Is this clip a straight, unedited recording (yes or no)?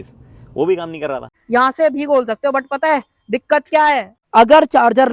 no